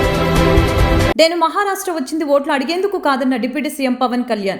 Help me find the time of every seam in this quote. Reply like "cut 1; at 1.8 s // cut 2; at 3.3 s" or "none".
cut 1; at 1.0 s